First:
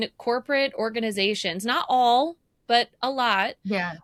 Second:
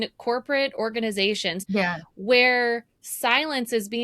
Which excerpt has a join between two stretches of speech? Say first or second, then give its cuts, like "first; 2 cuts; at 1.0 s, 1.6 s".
second; 1 cut; at 1.6 s